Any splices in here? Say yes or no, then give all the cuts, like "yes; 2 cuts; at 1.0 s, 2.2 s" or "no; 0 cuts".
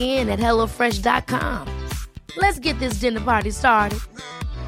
no; 0 cuts